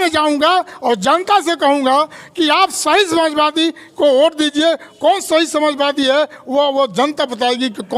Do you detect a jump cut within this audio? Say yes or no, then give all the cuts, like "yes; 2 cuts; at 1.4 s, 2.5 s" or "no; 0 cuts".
no; 0 cuts